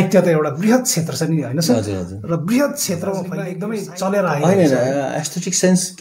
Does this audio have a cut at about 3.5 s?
yes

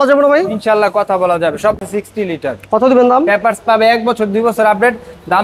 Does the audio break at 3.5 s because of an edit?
no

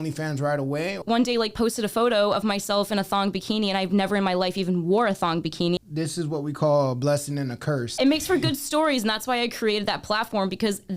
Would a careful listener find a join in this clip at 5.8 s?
yes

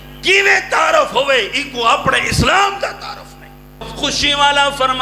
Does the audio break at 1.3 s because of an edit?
no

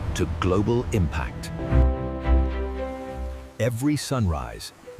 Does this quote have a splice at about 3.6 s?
no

